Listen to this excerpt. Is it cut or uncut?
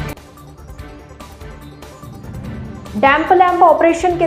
cut